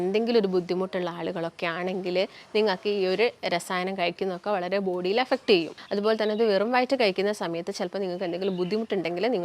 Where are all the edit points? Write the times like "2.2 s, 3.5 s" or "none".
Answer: 5.7 s